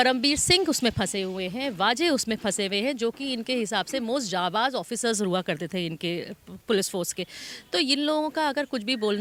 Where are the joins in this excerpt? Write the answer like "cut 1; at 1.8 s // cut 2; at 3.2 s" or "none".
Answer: none